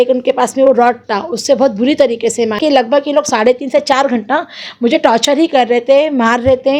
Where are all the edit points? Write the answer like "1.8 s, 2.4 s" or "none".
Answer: 2.6 s